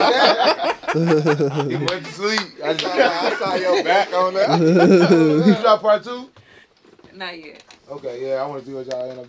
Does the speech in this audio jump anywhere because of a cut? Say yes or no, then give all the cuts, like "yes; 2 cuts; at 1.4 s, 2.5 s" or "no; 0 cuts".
no; 0 cuts